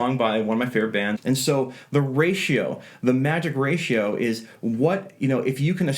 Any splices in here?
yes; 1 cut; at 1.2 s

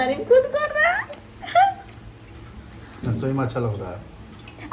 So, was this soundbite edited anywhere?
yes; 1 cut; at 2.1 s

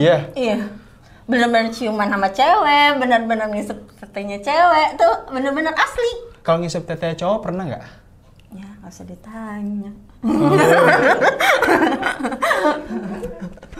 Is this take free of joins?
yes; 0 cuts

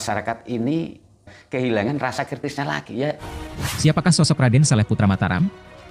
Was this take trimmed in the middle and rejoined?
yes; 1 cut; at 3.3 s

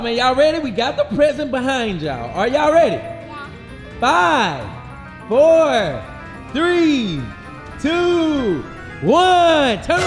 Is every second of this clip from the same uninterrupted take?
yes; 0 cuts

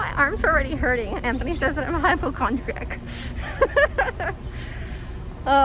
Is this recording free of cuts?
yes; 0 cuts

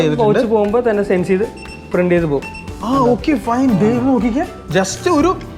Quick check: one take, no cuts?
yes; 0 cuts

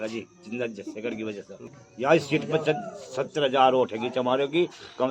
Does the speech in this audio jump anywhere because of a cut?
yes; 1 cut; at 1.6 s

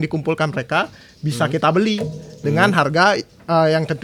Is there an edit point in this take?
no; 0 cuts

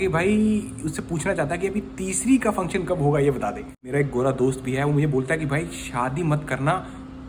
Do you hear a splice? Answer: yes; 1 cut; at 3.7 s

